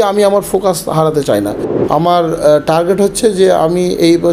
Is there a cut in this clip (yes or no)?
yes